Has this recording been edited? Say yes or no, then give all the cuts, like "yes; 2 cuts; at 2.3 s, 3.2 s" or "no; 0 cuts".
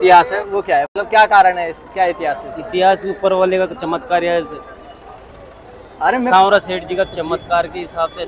no; 0 cuts